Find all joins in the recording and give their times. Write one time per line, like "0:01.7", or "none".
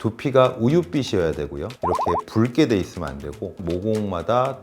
0:03.6